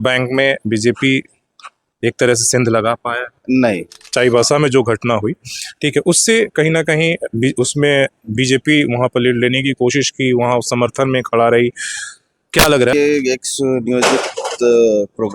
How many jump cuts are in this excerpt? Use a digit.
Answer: 2